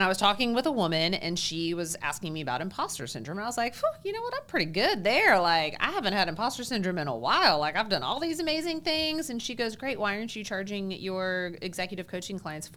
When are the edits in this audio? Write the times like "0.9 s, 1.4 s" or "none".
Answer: none